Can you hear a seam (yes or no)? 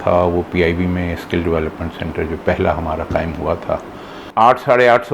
yes